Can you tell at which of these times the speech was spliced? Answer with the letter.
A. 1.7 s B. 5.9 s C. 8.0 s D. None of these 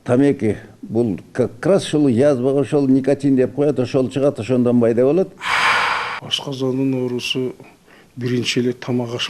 B